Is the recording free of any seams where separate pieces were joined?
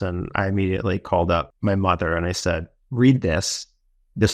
no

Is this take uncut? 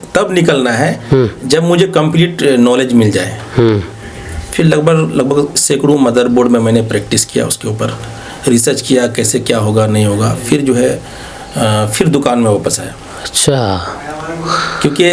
yes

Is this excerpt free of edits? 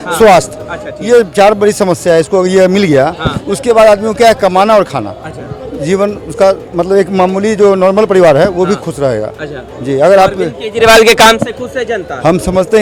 yes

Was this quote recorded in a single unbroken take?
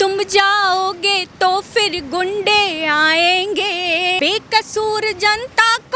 no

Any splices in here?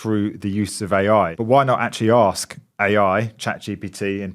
yes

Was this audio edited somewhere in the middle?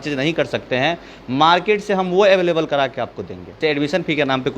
yes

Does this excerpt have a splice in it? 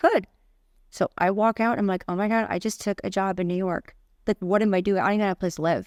no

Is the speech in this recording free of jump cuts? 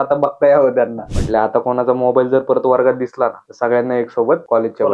no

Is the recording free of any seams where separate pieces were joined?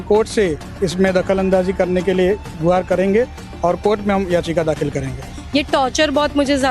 no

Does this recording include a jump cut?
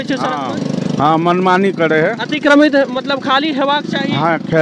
no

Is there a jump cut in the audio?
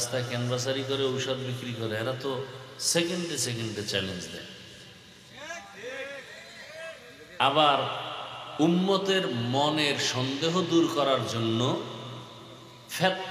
no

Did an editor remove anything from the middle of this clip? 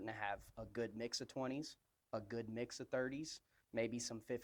no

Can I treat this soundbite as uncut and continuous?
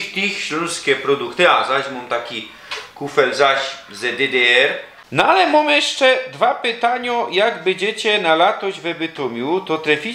no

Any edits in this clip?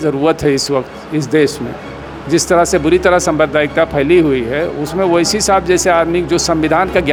no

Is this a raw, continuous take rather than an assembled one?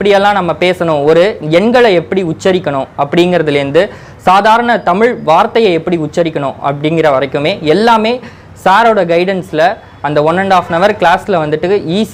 yes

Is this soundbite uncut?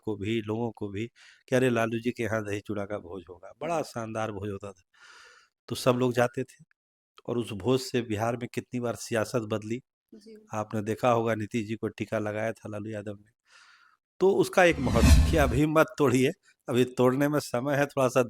no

